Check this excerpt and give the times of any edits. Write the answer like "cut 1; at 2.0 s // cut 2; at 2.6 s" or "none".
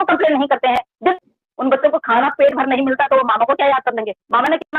cut 1; at 1.1 s